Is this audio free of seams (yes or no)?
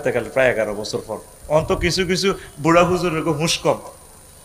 yes